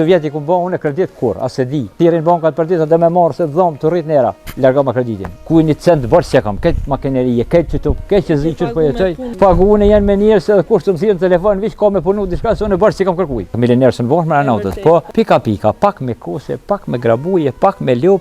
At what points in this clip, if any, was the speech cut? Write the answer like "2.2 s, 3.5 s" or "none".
1.9 s, 4.5 s, 5.3 s, 9.2 s, 13.6 s, 15.1 s

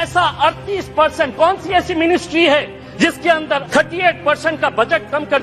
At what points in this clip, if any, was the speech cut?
3.2 s

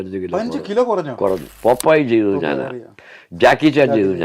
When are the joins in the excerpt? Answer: 1.5 s

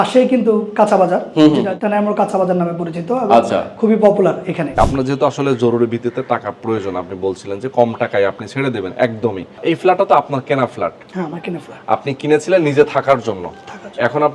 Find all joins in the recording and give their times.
1.7 s, 4.8 s, 9.6 s

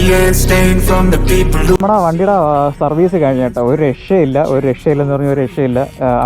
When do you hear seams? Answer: 1.8 s

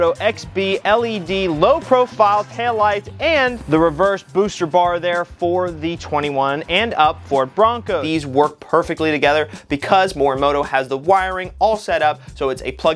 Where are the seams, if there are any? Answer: 3.6 s, 8.0 s

